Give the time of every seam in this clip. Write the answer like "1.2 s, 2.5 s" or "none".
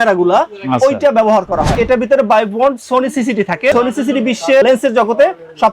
1.7 s, 3.7 s